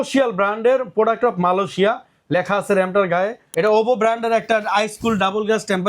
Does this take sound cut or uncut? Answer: cut